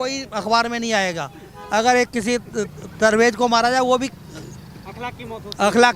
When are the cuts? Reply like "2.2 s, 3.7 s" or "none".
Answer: none